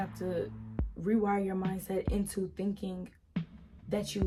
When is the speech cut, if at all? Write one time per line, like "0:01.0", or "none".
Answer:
none